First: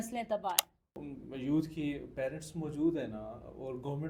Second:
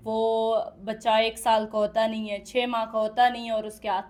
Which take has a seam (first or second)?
first